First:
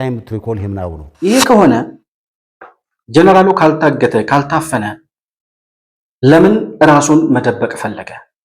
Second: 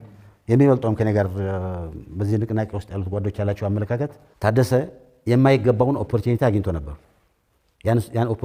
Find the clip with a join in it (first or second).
first